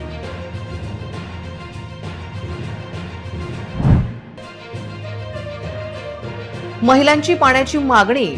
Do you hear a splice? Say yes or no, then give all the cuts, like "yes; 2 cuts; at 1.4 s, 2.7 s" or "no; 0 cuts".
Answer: no; 0 cuts